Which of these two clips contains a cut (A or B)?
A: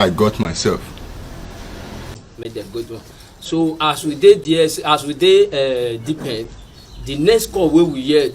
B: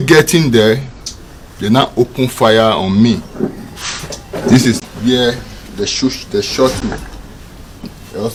A